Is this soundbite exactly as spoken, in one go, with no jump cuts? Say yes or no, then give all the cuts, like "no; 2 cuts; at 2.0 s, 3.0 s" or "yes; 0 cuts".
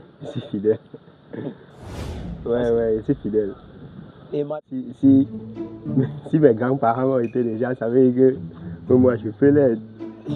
no; 1 cut; at 4.5 s